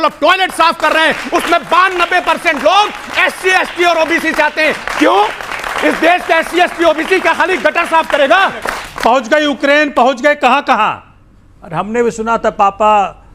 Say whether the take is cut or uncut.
cut